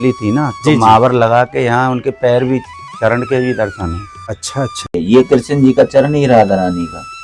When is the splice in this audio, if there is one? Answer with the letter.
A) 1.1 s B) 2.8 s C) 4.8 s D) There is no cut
C